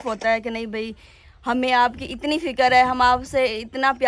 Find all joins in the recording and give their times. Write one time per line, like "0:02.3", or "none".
none